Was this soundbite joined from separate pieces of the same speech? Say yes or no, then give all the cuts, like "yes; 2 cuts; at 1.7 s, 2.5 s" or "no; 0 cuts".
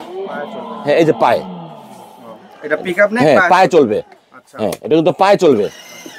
no; 0 cuts